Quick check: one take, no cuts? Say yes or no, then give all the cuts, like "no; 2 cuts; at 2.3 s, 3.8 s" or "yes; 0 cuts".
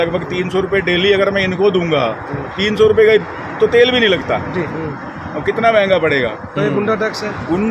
yes; 0 cuts